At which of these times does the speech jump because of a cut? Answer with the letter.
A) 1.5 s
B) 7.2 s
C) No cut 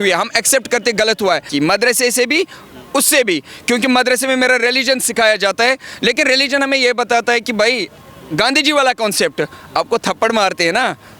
A